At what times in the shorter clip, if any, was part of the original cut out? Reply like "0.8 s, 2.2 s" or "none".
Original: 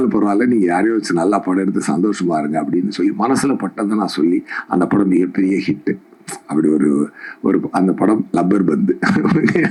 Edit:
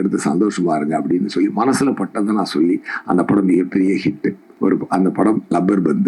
4.5 s